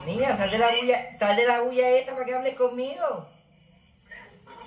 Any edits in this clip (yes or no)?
no